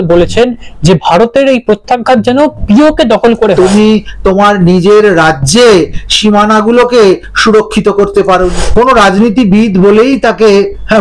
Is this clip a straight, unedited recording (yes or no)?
no